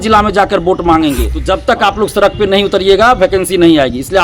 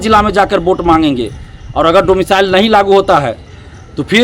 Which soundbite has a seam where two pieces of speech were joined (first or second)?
first